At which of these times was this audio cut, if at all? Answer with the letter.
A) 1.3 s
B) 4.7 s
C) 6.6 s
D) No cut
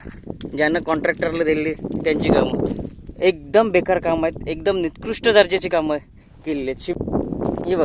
C